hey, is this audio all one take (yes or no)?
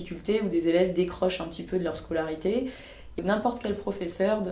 no